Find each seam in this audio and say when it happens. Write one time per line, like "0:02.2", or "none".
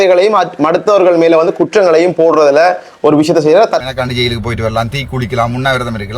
0:03.9